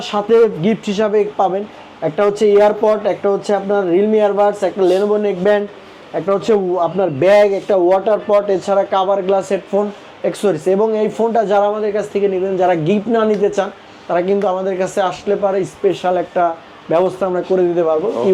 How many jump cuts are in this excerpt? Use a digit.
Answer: 0